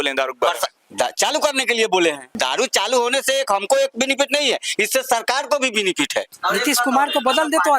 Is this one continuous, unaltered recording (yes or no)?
no